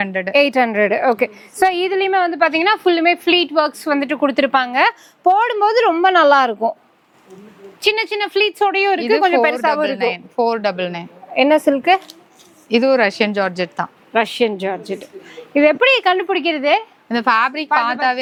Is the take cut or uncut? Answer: uncut